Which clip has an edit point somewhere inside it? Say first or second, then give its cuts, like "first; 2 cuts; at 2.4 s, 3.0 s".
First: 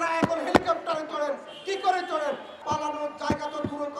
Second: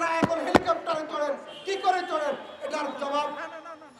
first; 1 cut; at 2.5 s